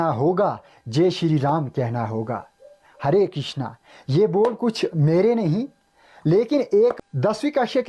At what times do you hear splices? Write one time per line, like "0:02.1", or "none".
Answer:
0:07.0